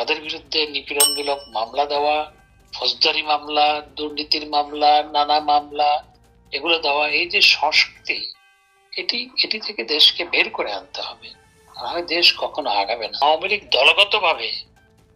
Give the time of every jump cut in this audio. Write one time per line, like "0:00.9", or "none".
0:13.2